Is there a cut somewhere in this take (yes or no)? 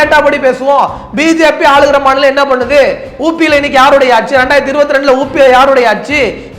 yes